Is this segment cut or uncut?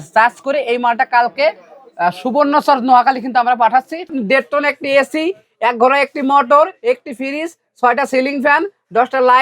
cut